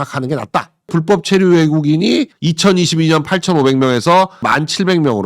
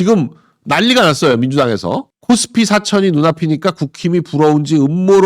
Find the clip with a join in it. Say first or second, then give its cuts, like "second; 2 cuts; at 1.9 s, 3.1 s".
first; 3 cuts; at 0.9 s, 2.3 s, 4.4 s